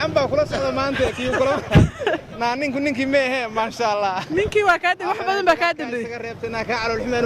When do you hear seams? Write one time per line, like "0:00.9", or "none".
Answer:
none